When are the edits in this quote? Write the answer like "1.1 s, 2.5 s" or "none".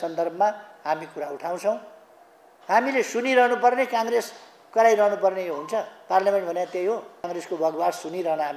7.3 s